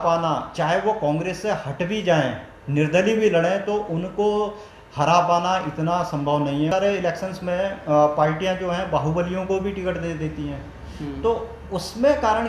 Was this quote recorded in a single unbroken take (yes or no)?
no